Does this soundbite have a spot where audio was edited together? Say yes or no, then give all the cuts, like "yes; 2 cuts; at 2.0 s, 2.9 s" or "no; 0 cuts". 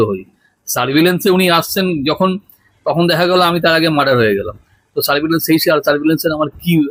no; 0 cuts